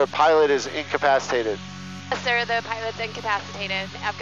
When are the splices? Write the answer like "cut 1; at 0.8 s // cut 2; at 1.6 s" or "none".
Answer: none